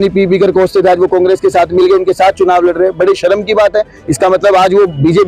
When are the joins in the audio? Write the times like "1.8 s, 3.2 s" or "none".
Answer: none